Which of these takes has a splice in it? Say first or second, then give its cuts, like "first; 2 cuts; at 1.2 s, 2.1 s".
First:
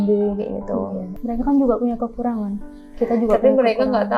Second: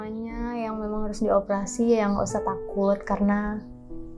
first; 1 cut; at 1.1 s